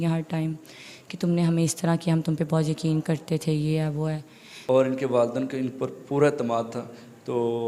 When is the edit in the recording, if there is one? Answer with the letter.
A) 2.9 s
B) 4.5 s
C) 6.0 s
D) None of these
B